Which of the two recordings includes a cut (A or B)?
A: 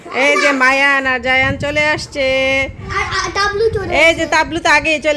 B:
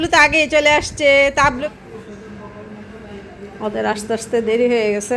B